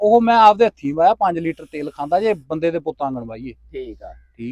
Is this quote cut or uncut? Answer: uncut